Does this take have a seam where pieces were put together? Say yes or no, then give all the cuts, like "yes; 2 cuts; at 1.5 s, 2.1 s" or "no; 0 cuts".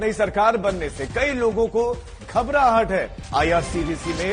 yes; 1 cut; at 3.2 s